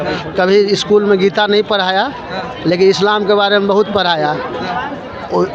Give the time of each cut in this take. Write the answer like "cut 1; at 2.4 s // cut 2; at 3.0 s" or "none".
none